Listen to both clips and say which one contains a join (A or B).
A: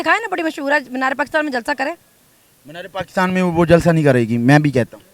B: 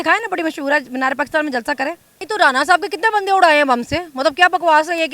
B